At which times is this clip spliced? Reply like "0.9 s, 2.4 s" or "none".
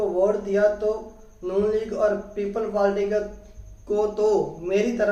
none